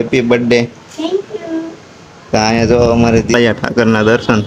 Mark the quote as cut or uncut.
cut